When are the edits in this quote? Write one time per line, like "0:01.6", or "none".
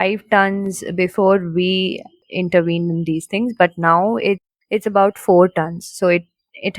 0:02.2
0:04.5